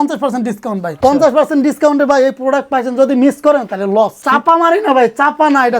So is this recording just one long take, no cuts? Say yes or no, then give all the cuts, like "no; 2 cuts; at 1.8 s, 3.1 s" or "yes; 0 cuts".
no; 2 cuts; at 0.9 s, 4.2 s